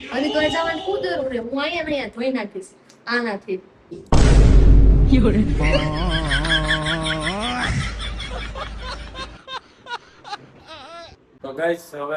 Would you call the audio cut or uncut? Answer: uncut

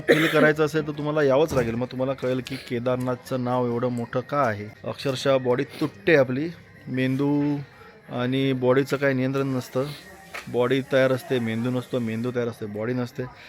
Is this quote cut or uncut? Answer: uncut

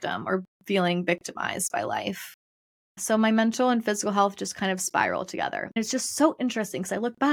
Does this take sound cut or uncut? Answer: cut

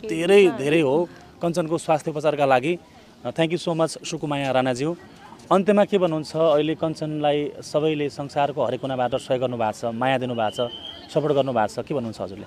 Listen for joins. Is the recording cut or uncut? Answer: uncut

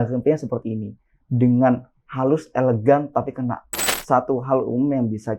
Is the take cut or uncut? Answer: cut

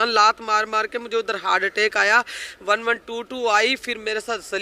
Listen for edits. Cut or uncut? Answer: uncut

